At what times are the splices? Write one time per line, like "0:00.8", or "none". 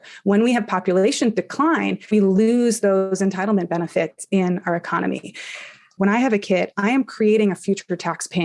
0:05.9